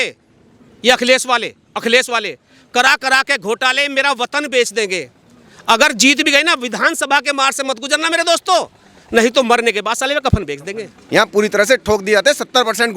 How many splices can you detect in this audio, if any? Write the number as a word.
one